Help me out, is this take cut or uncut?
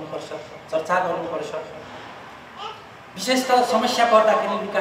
uncut